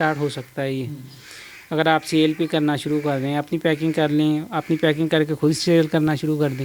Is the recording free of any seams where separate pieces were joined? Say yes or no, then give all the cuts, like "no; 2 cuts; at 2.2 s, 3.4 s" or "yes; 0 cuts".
yes; 0 cuts